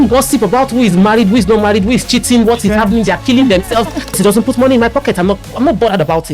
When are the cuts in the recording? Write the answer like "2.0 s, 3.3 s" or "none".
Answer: 4.1 s

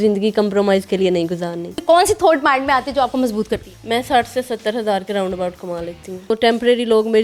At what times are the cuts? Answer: 1.8 s, 3.7 s, 6.3 s

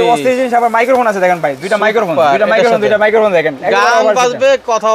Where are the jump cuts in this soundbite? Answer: none

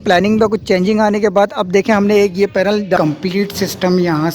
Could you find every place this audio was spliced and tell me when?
3.0 s

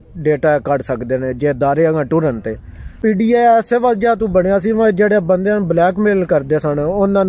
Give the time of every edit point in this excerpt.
3.0 s

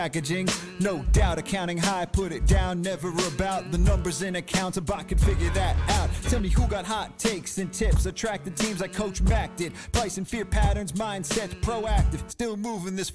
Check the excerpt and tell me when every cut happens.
none

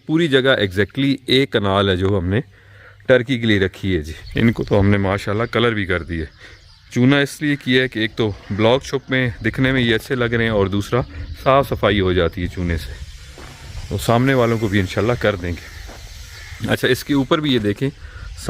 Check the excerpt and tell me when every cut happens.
4.2 s

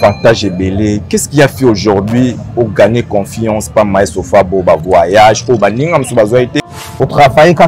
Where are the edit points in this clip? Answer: 6.6 s

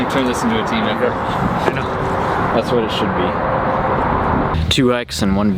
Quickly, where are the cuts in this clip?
4.5 s

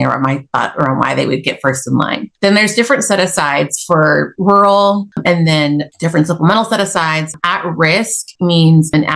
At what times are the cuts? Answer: 2.3 s, 5.1 s, 8.2 s

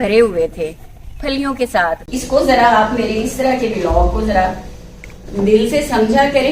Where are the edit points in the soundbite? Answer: 2.0 s

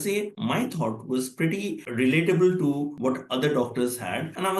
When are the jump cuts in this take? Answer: 1.8 s

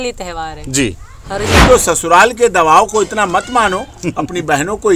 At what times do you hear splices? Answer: 1.5 s

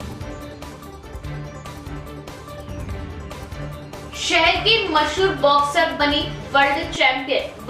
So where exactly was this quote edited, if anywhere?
1.7 s, 4.0 s

